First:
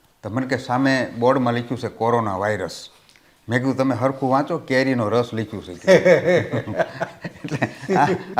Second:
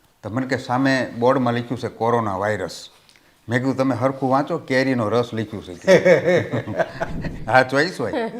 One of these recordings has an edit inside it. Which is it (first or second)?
second